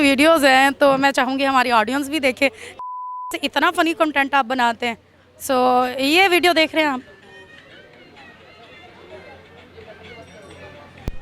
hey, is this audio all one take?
yes; 0 cuts

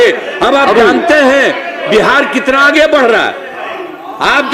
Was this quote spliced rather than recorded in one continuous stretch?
no; 0 cuts

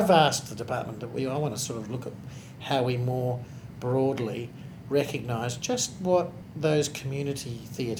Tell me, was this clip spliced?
yes; 1 cut; at 6.4 s

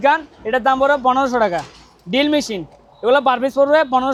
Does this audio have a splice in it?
no; 0 cuts

